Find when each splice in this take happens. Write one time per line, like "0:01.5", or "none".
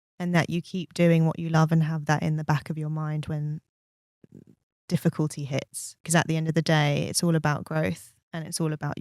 0:06.1